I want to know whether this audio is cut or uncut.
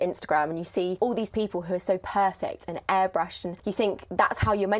cut